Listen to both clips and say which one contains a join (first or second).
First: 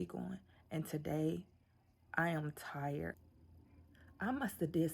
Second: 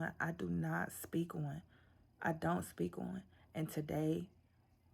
first